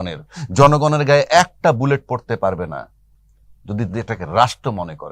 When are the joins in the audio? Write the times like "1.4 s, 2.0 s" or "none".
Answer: none

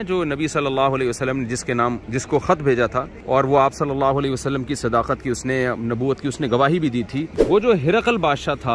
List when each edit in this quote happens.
2.0 s, 3.1 s, 7.3 s

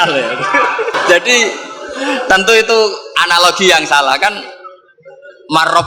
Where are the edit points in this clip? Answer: 1.0 s

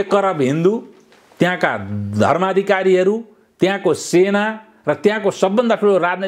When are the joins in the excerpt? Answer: none

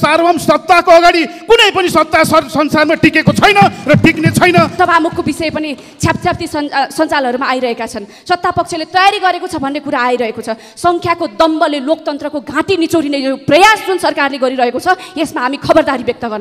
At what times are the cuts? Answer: 4.7 s

